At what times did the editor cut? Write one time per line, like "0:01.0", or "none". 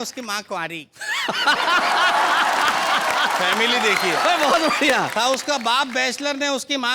none